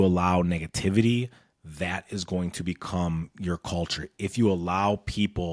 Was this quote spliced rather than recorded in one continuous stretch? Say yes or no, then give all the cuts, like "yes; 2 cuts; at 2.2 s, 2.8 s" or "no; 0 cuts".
no; 0 cuts